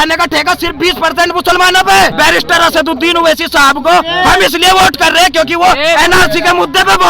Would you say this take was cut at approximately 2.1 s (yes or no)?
yes